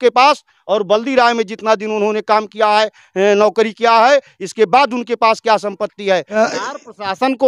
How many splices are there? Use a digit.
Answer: 1